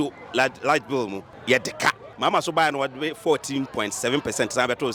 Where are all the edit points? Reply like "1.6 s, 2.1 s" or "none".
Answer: 1.3 s, 2.1 s